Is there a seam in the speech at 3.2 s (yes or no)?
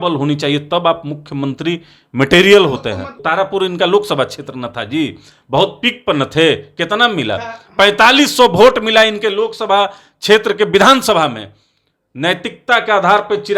yes